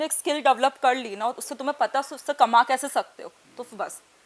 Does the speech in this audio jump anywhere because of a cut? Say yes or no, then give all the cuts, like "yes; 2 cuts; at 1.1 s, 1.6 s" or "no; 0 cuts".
no; 0 cuts